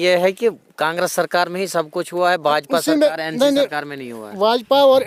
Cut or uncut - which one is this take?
uncut